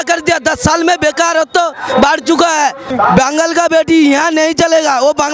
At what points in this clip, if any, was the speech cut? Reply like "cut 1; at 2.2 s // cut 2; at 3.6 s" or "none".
cut 1; at 2.9 s